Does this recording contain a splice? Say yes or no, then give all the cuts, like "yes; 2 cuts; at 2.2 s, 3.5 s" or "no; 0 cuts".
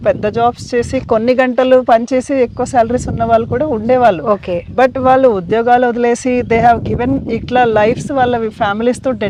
no; 0 cuts